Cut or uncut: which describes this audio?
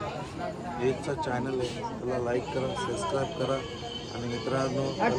uncut